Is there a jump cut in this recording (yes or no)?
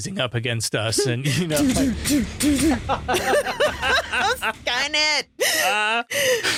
no